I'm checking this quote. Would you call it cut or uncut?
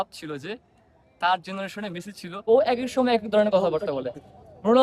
cut